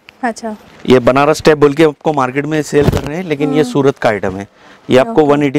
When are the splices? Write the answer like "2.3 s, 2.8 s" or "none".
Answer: none